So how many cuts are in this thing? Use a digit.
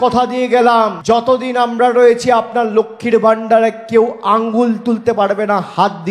1